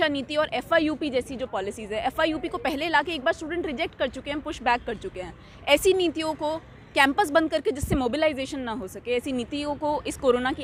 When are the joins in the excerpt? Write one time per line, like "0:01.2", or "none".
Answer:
none